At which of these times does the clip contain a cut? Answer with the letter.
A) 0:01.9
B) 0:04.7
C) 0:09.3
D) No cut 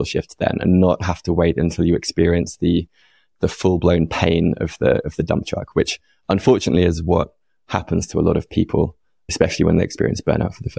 C